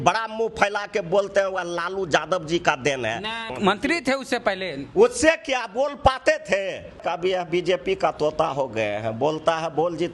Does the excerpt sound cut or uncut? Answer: cut